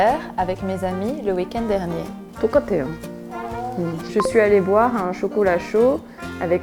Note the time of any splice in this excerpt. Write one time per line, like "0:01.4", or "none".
none

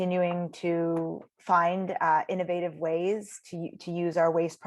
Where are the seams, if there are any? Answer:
0:01.3

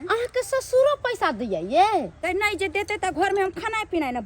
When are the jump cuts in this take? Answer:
0:02.2

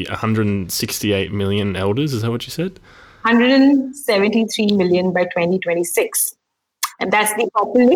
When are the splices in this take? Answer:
none

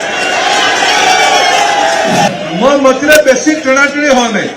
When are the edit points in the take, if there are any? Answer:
0:02.3

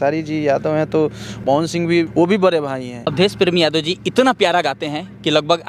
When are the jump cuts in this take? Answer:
0:01.2
0:02.1
0:03.1

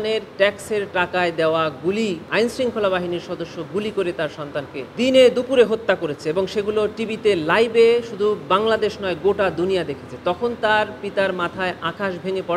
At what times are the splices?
0:02.2
0:04.8

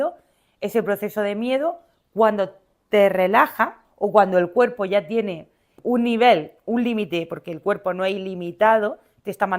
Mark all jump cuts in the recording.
0:03.8
0:05.7

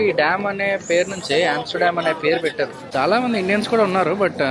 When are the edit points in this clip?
0:02.8

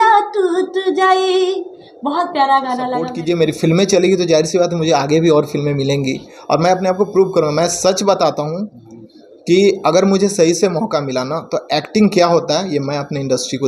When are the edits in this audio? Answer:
0:03.1

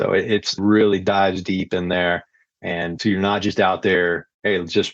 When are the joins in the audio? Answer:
0:02.9

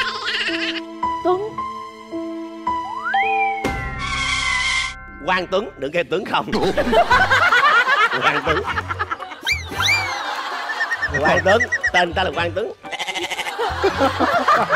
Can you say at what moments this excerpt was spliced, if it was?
none

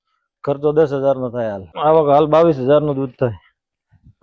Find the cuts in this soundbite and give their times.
0:01.6

